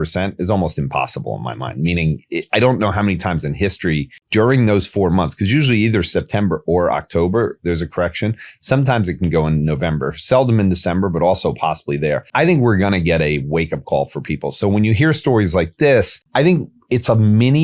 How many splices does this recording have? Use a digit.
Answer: 3